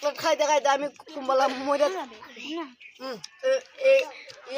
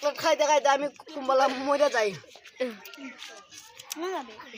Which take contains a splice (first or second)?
first